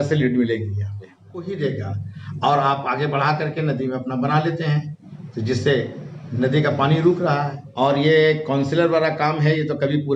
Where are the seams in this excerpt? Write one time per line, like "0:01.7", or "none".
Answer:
0:01.4
0:07.6